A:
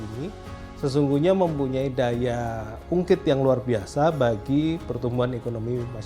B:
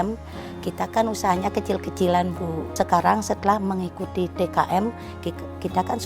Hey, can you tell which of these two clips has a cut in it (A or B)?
B